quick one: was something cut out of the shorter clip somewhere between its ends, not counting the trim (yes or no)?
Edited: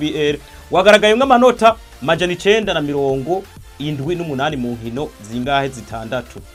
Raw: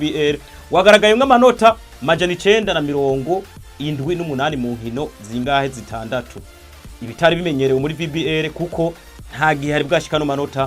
no